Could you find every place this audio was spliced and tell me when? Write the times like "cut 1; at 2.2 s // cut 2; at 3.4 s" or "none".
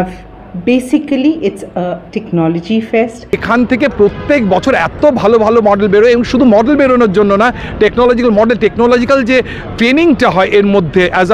cut 1; at 3.4 s